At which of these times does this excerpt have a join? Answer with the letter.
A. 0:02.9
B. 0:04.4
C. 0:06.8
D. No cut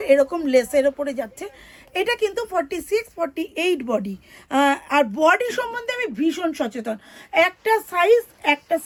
D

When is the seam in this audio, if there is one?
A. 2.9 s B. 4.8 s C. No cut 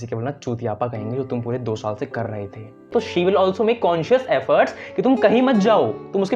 A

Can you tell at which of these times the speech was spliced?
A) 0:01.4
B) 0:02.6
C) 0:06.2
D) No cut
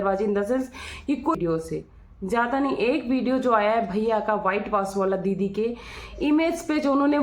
A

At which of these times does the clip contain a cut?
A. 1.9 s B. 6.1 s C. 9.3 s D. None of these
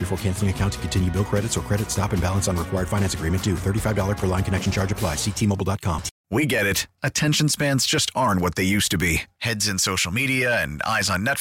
B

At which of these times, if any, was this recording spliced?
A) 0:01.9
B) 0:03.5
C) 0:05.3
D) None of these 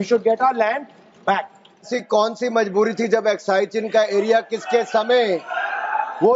A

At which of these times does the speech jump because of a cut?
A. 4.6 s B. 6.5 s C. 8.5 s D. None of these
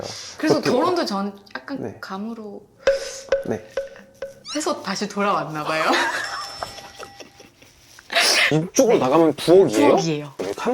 C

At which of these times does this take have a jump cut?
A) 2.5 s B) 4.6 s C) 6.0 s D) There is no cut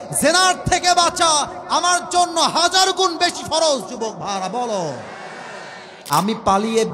C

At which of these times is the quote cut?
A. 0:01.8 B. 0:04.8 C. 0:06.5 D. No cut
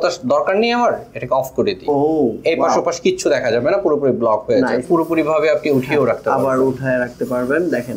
B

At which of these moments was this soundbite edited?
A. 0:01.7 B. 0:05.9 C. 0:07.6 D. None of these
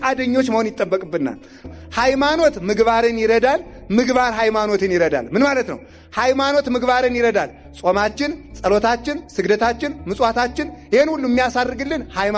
A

